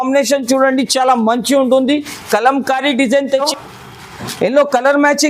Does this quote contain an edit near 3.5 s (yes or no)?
yes